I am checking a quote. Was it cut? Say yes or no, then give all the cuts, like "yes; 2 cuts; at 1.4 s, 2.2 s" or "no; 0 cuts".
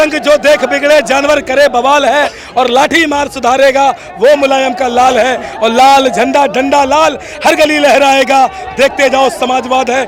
no; 0 cuts